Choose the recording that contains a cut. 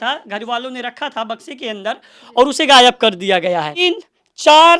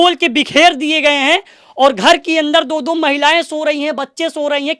first; 1 cut; at 3.8 s

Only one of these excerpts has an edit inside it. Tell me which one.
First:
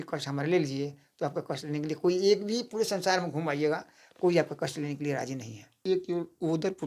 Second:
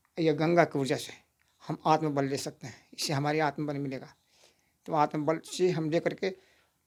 first; 1 cut; at 5.8 s

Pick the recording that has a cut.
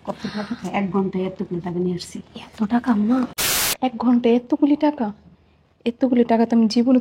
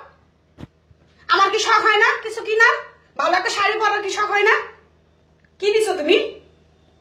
first; 1 cut; at 3.5 s

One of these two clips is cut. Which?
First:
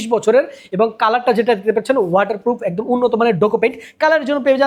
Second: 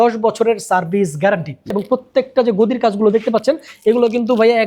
second; 1 cut; at 1.7 s

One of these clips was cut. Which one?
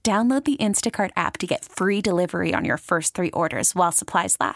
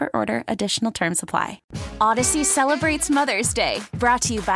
second; 1 cut; at 1.6 s

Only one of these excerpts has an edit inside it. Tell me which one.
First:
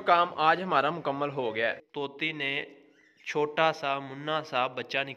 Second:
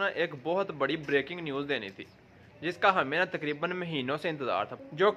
first; 1 cut; at 1.9 s

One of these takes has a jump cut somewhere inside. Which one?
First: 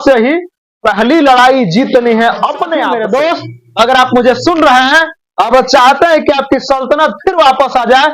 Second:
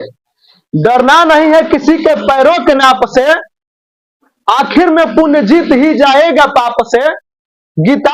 first; 1 cut; at 2.9 s

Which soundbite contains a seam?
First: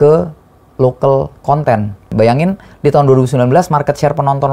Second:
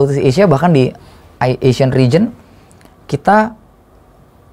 first; 1 cut; at 2.1 s

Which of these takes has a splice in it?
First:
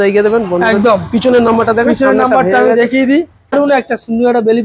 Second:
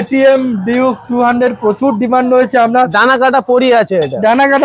first; 1 cut; at 3.5 s

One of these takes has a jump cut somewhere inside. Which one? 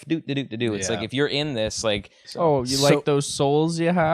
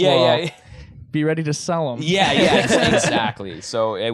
first; 1 cut; at 2.2 s

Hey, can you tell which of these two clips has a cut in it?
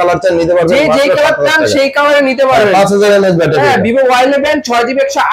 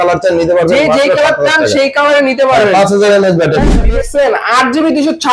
second; 1 cut; at 3.8 s

